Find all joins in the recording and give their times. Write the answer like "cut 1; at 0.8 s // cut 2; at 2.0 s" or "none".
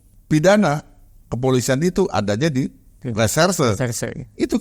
none